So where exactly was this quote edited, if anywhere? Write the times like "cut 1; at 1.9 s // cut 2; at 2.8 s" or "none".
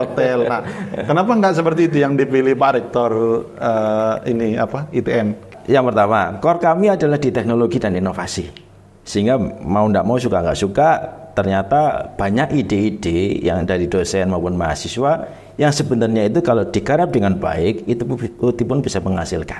cut 1; at 5.4 s